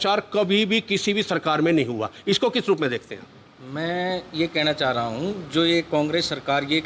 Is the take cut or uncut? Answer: uncut